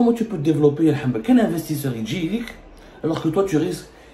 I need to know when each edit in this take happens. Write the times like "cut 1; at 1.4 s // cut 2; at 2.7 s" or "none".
none